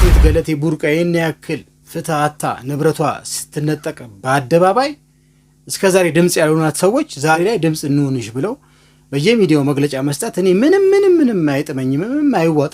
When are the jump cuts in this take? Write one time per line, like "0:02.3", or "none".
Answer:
0:07.3

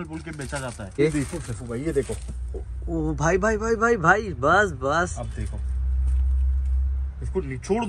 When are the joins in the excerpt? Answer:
0:01.0

